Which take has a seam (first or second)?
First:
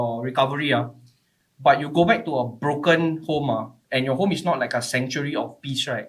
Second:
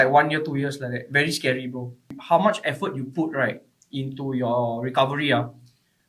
second